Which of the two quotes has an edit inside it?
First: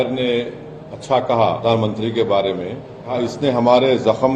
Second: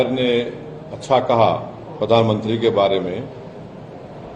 first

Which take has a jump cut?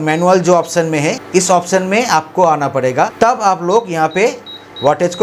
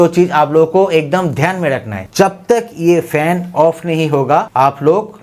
second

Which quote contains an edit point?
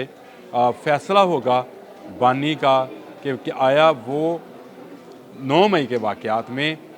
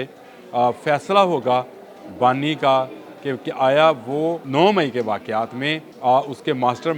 second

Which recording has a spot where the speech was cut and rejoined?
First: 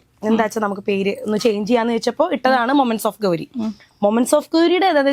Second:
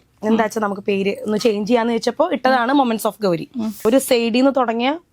second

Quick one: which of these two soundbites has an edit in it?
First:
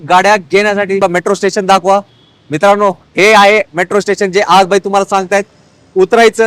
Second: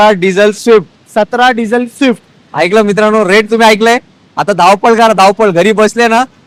first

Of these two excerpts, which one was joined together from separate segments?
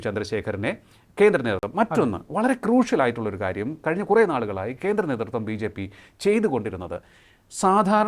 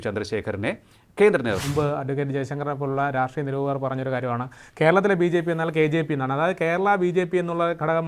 second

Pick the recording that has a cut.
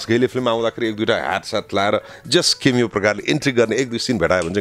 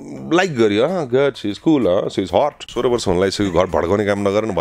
second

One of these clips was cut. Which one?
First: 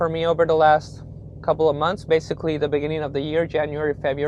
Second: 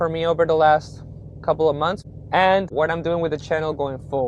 second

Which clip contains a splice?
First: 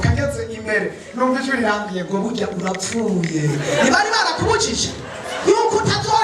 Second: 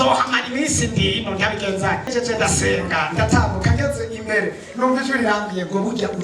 second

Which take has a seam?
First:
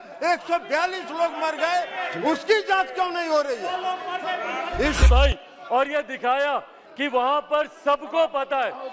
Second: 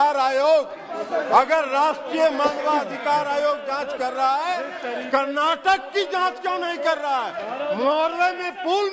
first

